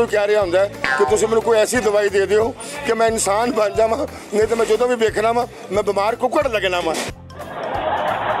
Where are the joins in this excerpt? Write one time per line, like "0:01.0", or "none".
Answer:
none